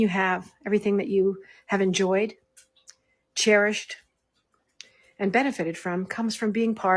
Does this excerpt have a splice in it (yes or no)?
yes